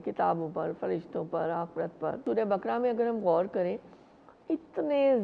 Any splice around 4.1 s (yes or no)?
no